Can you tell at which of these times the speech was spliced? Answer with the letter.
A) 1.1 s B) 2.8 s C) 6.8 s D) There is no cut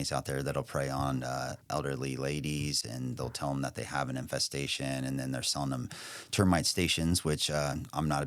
B